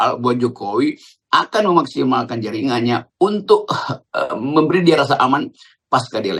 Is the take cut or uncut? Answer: uncut